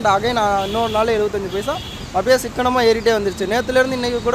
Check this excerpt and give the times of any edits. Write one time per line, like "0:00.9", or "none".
none